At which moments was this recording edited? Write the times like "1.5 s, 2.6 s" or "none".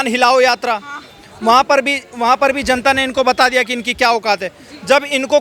none